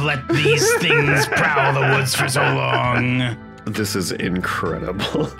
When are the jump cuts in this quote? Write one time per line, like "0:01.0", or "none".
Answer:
0:03.5